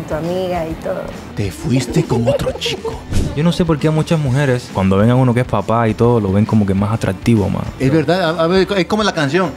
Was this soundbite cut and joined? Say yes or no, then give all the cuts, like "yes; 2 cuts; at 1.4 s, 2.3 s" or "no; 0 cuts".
yes; 4 cuts; at 1.2 s, 3.2 s, 4.7 s, 7.7 s